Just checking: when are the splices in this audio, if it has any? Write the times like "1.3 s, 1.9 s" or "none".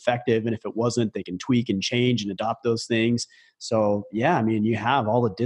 none